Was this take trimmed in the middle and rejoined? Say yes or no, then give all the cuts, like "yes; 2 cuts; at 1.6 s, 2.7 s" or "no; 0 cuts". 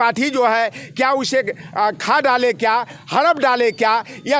no; 0 cuts